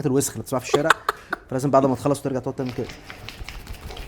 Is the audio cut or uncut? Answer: uncut